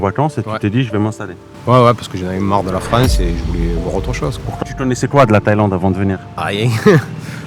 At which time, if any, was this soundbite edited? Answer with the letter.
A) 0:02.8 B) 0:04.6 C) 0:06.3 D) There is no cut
B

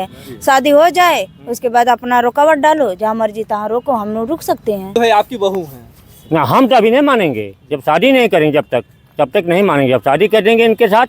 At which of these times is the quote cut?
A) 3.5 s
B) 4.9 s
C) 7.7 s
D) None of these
B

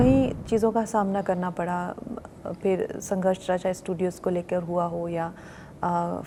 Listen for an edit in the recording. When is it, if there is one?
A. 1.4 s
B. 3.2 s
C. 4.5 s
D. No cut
D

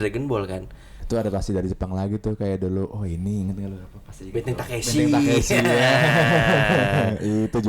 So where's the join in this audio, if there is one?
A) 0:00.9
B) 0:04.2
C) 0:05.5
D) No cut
A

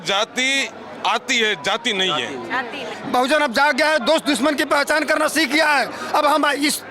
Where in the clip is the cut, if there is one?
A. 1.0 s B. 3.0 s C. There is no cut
B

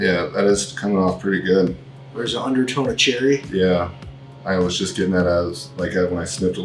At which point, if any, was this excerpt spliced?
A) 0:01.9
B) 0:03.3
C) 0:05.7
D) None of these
D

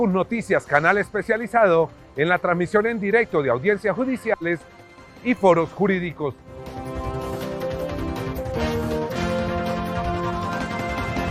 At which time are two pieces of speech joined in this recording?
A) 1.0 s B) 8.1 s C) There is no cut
C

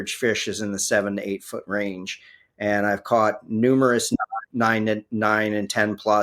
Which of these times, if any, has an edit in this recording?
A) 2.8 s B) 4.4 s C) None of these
B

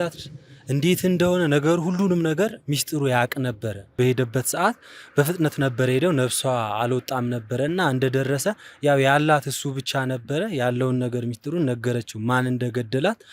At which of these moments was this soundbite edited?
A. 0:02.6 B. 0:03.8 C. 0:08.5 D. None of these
D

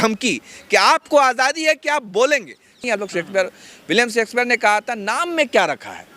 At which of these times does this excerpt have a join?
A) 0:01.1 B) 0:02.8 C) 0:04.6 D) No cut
B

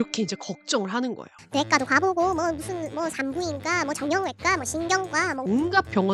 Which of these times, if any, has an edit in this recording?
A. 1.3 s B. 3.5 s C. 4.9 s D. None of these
A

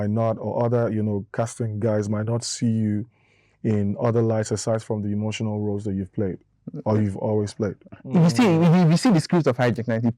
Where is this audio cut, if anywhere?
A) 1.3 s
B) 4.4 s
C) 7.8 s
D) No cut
C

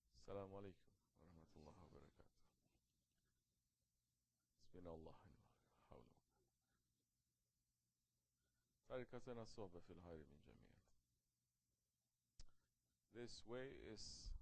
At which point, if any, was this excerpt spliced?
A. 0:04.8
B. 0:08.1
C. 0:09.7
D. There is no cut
A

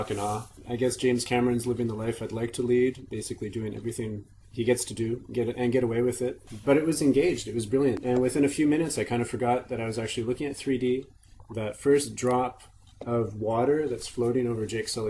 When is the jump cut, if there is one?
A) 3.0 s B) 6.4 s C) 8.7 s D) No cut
C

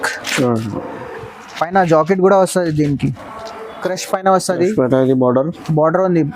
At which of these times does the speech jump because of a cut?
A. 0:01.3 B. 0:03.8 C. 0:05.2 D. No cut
B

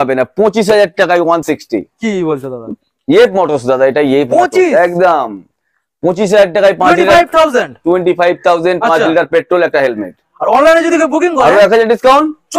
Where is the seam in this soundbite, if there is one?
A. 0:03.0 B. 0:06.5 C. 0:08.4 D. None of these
D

